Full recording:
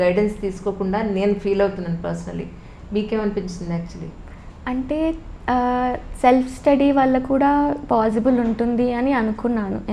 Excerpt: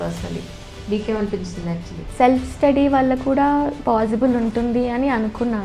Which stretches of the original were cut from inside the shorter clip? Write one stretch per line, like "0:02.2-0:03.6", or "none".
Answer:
0:04.1-0:06.1